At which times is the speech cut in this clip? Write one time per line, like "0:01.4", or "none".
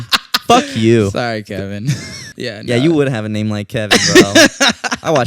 0:02.3